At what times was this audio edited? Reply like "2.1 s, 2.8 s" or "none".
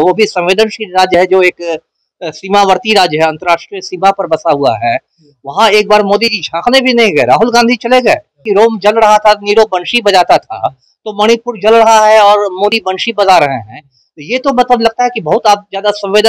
8.4 s